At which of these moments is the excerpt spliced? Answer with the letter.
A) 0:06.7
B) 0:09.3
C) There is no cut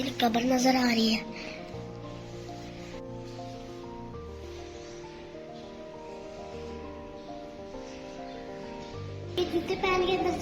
B